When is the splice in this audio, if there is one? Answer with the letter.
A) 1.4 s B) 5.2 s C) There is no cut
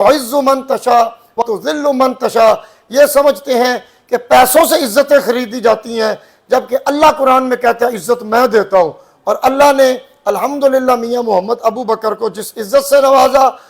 A